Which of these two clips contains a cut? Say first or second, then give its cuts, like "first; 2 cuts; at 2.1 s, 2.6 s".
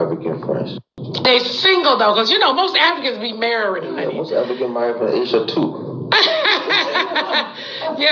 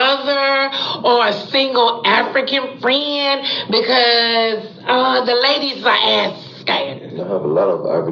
first; 1 cut; at 1.1 s